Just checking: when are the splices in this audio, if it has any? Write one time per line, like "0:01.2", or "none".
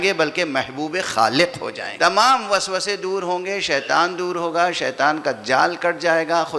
0:01.8